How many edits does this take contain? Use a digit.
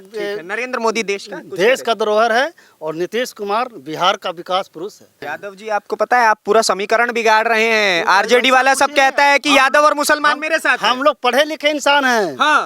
1